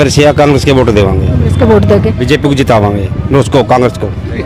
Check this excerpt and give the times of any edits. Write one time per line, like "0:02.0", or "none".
none